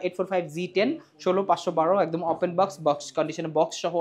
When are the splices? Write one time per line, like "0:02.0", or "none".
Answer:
none

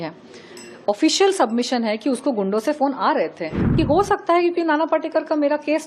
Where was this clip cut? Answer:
0:03.7

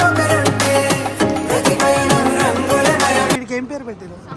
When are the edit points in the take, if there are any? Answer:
0:03.4

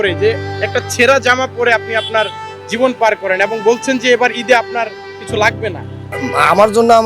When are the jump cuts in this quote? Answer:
0:06.0

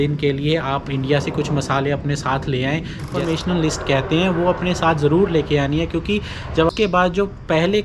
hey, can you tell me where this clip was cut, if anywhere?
0:03.1
0:06.7

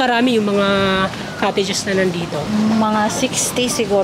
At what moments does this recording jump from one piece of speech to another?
none

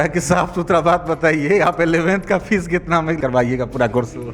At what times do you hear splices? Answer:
0:03.2

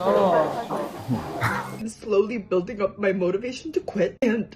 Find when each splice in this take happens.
0:01.9

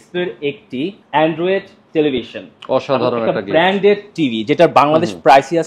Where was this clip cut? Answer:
0:01.0

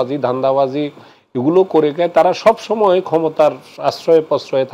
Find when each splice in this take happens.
none

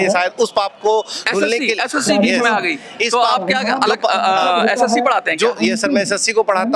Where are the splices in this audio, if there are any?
none

